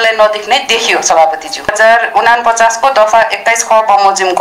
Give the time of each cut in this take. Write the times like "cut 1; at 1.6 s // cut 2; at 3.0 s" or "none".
cut 1; at 1.7 s